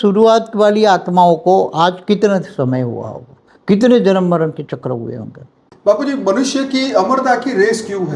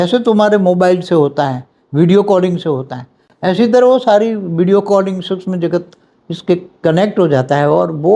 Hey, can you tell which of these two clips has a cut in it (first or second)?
first